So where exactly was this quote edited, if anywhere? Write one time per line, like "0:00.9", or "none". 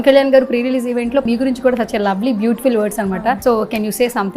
0:01.2
0:03.4